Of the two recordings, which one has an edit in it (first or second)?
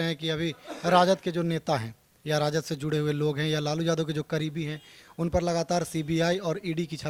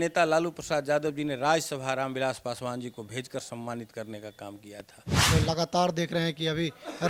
second